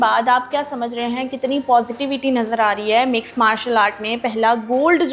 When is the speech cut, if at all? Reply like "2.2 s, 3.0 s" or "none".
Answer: none